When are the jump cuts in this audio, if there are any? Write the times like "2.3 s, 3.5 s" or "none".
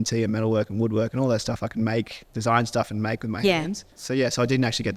3.8 s